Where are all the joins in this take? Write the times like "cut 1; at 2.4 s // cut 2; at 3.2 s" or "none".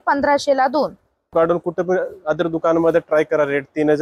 cut 1; at 1.3 s